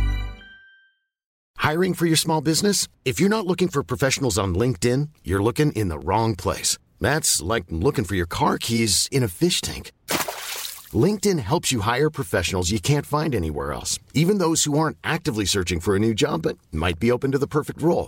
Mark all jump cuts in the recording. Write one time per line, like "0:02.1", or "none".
0:01.5

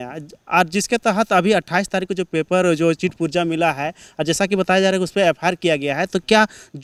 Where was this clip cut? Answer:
none

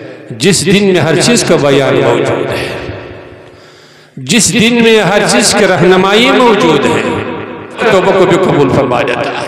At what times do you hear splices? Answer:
0:07.8

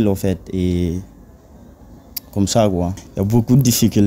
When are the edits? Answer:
0:03.0

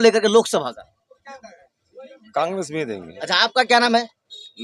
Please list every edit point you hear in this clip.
0:03.1

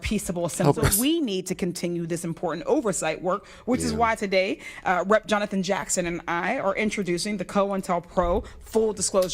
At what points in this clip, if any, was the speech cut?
0:00.9

